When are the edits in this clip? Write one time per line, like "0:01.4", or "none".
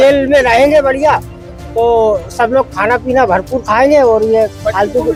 none